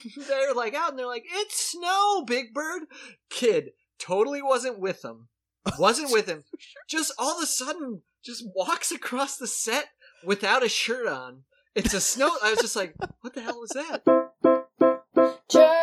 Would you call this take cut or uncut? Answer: cut